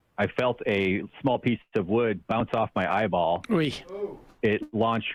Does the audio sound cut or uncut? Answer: uncut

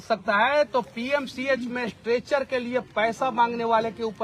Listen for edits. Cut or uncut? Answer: uncut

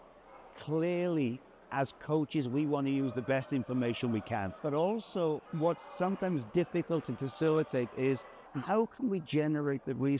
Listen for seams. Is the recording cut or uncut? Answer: cut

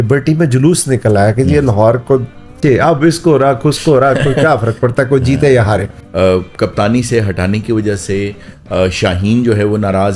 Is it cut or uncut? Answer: cut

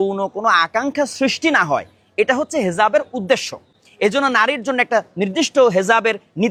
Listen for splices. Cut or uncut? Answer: uncut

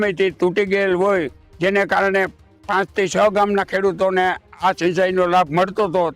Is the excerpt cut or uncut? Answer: uncut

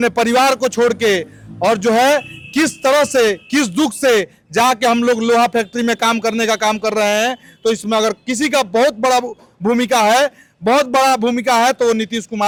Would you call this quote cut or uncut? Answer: uncut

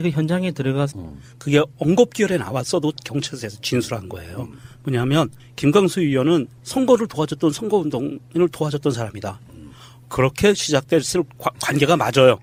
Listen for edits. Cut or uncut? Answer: uncut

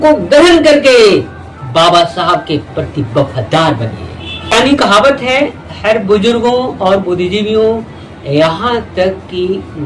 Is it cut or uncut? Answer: cut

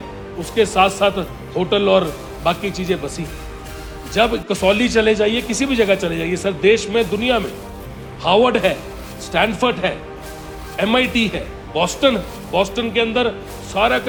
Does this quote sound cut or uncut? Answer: uncut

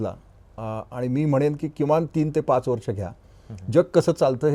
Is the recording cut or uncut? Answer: uncut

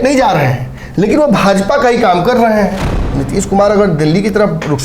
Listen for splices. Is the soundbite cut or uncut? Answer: cut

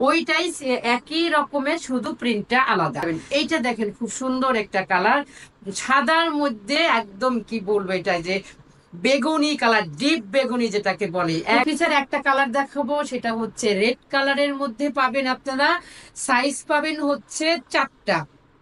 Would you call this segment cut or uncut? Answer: cut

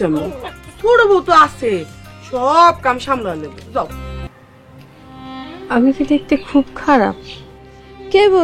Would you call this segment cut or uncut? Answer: cut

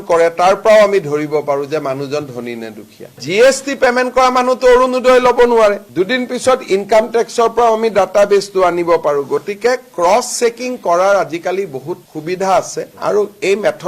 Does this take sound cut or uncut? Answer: cut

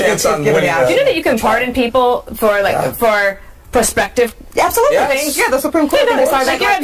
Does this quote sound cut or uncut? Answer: uncut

